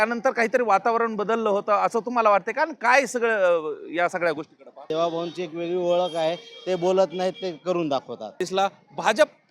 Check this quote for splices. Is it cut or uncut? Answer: cut